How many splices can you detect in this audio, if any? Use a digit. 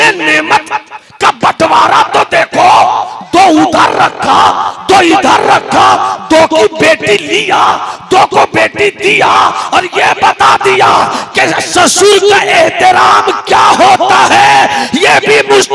0